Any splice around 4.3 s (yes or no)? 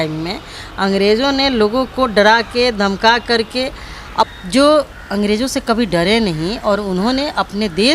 yes